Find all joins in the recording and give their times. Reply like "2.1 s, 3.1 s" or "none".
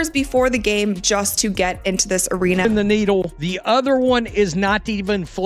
2.6 s